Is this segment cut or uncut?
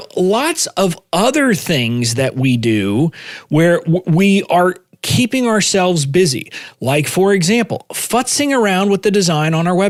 uncut